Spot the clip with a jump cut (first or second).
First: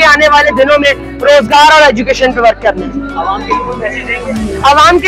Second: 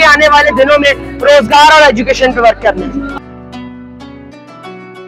second